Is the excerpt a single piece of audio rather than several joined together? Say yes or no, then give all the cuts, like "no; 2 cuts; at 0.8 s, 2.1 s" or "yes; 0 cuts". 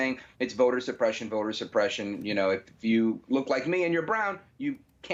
yes; 0 cuts